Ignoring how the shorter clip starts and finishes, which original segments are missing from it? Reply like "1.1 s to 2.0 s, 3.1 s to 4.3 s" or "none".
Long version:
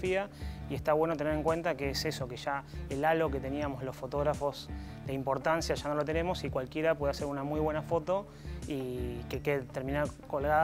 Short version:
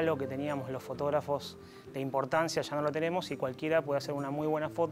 none